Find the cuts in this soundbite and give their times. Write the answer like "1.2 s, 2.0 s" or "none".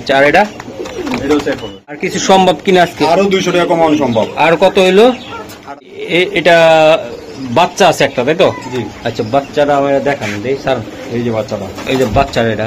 2.0 s, 5.8 s